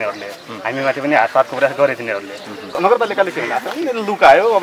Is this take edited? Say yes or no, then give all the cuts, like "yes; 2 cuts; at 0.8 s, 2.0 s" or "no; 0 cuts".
yes; 1 cut; at 2.8 s